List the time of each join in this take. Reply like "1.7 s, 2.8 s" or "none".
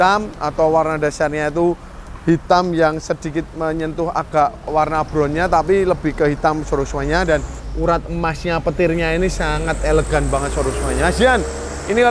4.7 s, 7.6 s